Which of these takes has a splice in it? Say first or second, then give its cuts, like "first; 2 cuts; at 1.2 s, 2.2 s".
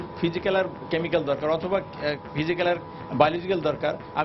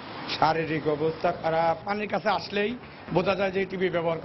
second; 1 cut; at 1.9 s